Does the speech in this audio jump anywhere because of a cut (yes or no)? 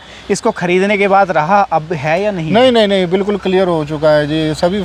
no